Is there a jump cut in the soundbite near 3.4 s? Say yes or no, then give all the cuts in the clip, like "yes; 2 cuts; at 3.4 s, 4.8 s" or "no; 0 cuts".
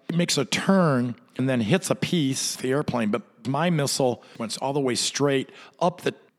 yes; 4 cuts; at 1.4 s, 2.6 s, 3.4 s, 4.4 s